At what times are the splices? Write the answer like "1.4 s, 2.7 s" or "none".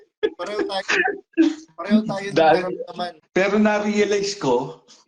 3.1 s